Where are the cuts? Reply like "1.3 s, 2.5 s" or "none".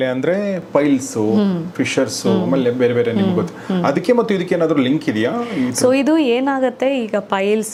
none